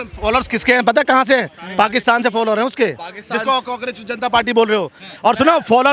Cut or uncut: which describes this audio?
uncut